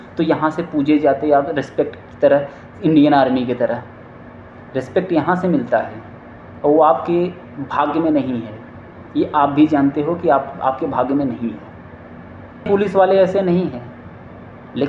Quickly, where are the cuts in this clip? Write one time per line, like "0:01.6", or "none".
0:12.7